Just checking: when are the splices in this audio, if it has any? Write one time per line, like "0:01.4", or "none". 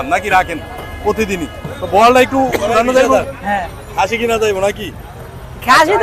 0:03.1